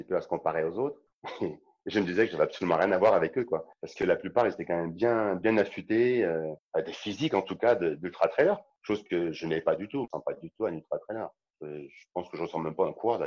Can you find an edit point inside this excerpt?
yes; 4 cuts; at 6.6 s, 8.7 s, 10.1 s, 11.5 s

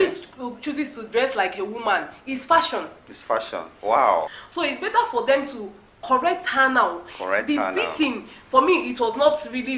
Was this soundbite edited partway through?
yes; 1 cut; at 4.4 s

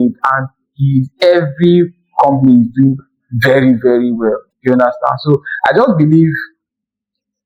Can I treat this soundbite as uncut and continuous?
yes; 0 cuts

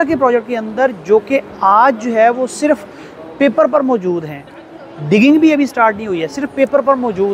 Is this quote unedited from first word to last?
yes; 0 cuts

